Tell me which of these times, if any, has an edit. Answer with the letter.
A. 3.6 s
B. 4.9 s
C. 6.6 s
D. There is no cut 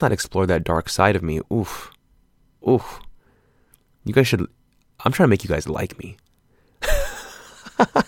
D